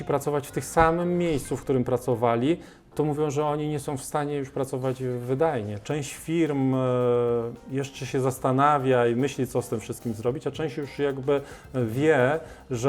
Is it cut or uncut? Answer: cut